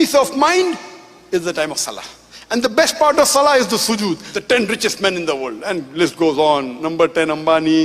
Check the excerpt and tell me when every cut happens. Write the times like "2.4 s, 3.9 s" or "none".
4.3 s, 6.7 s